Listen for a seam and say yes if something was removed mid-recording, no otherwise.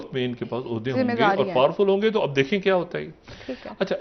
no